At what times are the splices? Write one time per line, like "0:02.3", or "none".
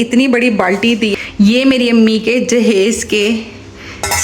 0:01.1